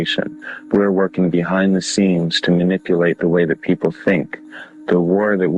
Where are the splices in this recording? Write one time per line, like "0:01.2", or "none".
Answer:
0:02.6